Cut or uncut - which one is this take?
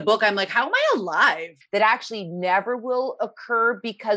cut